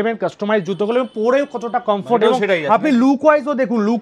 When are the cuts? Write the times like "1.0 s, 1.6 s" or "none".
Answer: none